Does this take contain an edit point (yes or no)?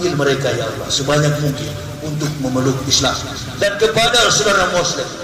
no